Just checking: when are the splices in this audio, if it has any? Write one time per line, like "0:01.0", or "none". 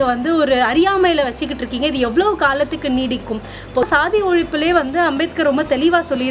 0:03.9